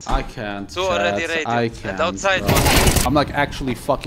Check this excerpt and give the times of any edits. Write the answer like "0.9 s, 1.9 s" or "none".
3.0 s